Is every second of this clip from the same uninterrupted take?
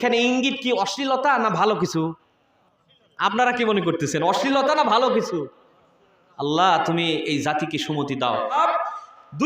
no; 1 cut; at 8.6 s

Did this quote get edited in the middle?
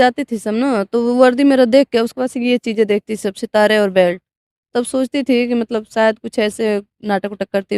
no; 0 cuts

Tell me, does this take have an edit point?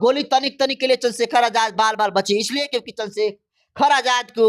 no; 0 cuts

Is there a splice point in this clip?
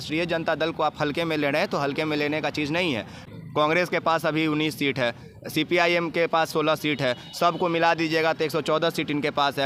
no; 0 cuts

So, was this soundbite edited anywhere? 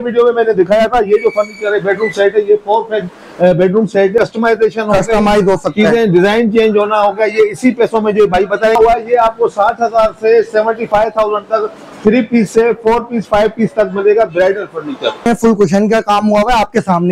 yes; 3 cuts; at 4.2 s, 8.8 s, 15.3 s

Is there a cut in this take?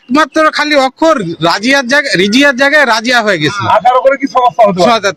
no; 0 cuts

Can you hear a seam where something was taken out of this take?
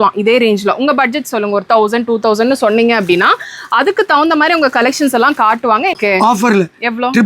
yes; 1 cut; at 6.0 s

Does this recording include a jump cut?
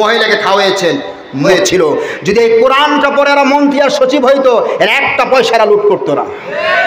yes; 1 cut; at 1.5 s

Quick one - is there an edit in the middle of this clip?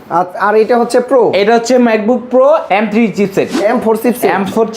yes; 1 cut; at 3.5 s

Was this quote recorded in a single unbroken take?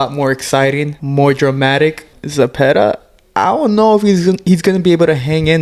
no; 2 cuts; at 1.0 s, 2.2 s

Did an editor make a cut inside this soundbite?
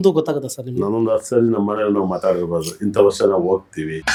no; 0 cuts

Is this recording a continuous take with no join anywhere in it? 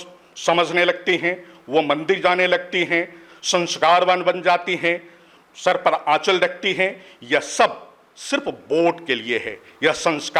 yes; 0 cuts

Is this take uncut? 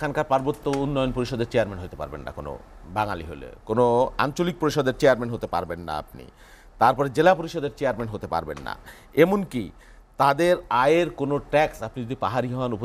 yes; 0 cuts

